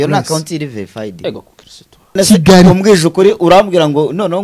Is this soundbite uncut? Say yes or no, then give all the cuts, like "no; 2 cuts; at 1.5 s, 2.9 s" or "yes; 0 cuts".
no; 1 cut; at 2.2 s